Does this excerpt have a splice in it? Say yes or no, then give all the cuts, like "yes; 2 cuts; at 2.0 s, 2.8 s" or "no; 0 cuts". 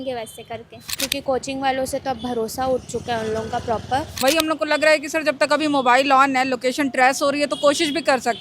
yes; 2 cuts; at 1.0 s, 4.1 s